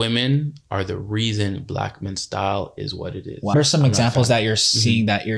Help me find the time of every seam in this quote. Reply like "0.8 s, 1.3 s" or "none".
3.5 s